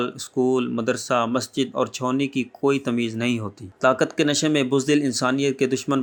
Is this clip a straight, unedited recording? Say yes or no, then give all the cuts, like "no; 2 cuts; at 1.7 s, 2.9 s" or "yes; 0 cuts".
yes; 0 cuts